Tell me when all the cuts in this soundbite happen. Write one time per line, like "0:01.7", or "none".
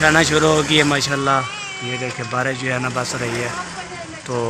none